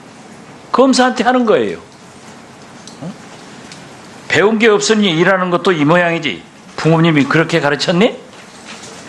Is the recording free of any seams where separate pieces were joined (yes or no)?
yes